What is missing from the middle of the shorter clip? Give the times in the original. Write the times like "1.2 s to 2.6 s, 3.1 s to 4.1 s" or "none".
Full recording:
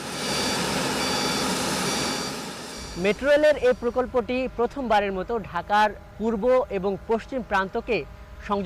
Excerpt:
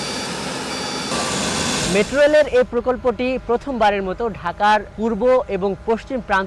1.5 s to 2.3 s, 6.0 s to 6.1 s